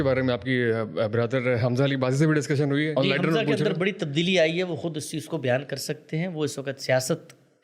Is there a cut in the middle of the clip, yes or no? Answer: yes